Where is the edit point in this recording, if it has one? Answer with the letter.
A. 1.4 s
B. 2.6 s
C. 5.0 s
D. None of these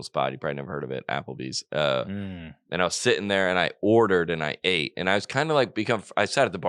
D